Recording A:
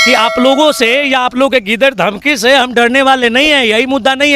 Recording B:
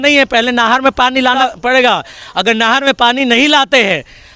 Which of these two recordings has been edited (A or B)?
B